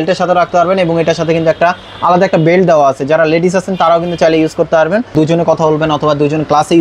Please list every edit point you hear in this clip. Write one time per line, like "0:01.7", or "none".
0:05.1